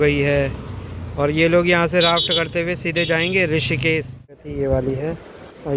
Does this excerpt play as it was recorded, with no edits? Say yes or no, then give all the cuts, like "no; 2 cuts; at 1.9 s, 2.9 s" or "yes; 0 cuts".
no; 1 cut; at 4.5 s